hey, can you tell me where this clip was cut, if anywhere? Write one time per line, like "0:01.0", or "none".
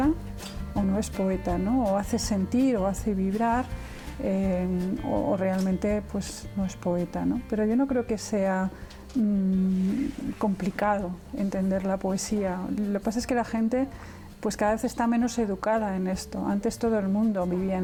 none